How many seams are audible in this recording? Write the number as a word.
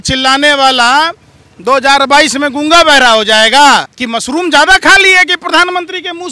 one